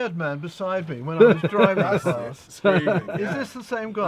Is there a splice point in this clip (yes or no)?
no